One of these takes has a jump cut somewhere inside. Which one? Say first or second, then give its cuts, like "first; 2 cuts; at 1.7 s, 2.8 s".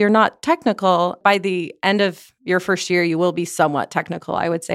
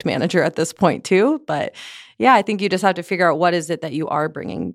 first; 1 cut; at 1.2 s